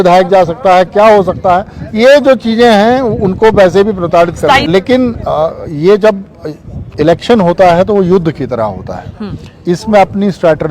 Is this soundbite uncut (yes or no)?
no